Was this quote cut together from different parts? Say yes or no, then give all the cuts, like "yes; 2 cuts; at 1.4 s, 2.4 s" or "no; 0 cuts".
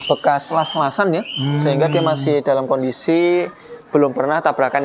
no; 0 cuts